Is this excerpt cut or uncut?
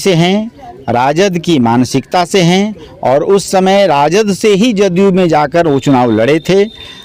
uncut